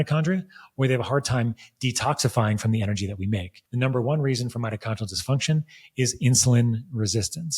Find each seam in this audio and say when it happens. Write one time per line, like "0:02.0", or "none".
0:03.6